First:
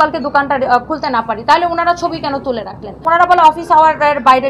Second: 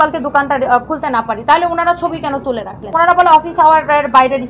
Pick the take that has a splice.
second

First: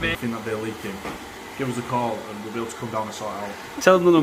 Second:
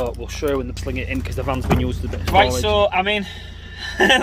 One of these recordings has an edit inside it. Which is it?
second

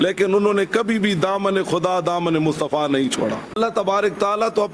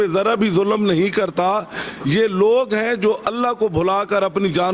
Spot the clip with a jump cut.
first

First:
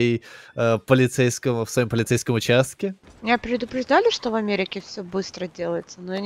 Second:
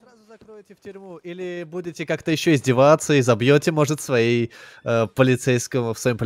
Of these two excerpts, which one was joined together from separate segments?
first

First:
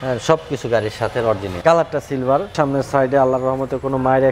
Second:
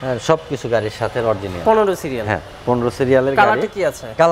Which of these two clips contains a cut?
first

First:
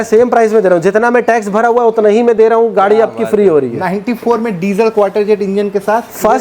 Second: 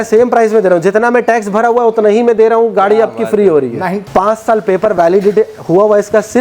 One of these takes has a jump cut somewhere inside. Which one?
second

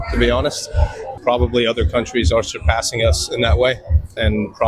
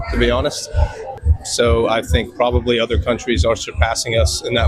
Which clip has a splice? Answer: first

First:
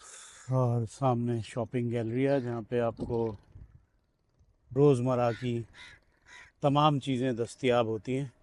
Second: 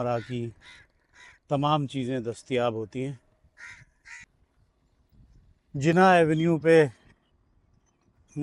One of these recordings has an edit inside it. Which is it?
second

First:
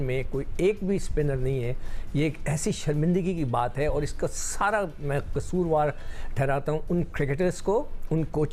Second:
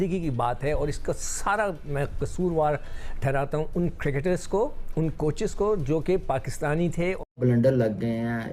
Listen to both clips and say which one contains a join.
second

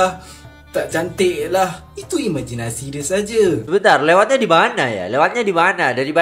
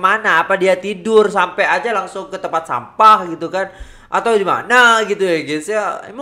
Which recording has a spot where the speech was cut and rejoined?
first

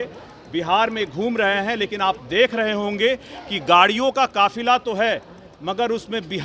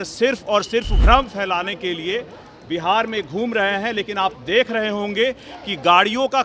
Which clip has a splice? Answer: second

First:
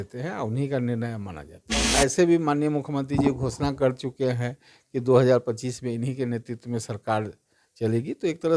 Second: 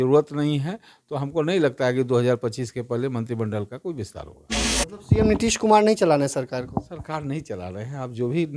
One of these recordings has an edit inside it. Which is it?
first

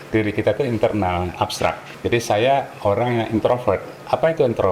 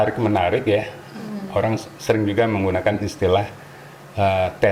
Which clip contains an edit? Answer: first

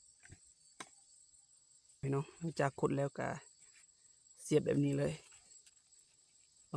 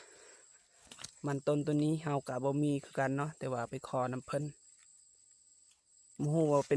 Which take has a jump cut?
first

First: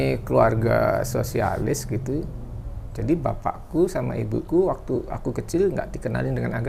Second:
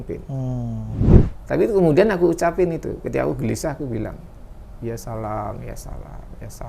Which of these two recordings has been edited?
second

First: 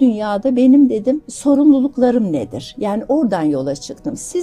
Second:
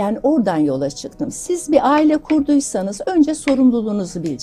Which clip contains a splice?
first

